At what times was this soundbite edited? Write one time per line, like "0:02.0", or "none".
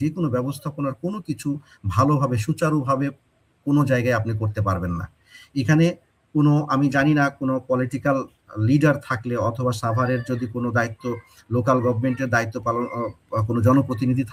none